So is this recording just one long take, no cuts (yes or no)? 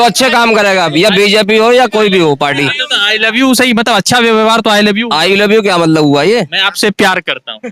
yes